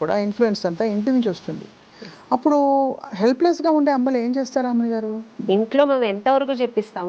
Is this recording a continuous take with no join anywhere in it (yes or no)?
no